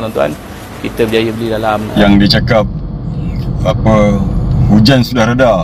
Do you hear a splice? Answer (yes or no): yes